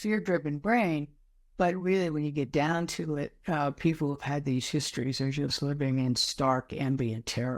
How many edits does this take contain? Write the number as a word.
zero